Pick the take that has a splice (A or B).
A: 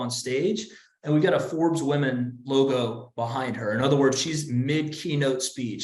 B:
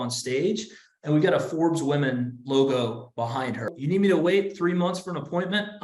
B